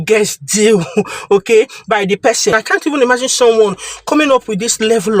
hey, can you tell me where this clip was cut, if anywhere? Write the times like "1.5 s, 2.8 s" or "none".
2.5 s